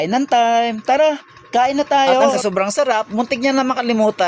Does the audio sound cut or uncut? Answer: cut